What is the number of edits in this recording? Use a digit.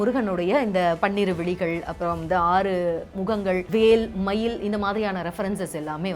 1